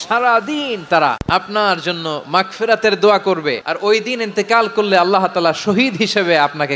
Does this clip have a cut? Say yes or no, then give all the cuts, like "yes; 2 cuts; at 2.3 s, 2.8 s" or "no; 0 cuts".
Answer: yes; 2 cuts; at 1.2 s, 3.7 s